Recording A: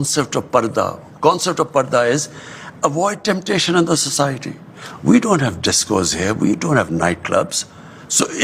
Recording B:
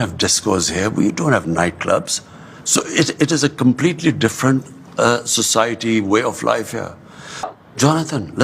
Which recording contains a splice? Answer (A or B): B